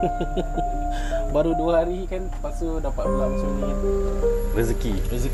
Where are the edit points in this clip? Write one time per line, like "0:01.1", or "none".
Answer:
none